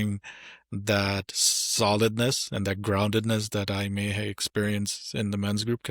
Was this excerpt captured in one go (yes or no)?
yes